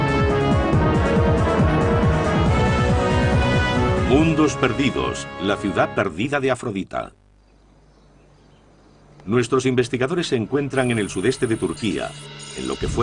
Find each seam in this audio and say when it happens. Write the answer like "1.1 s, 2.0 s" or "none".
1.2 s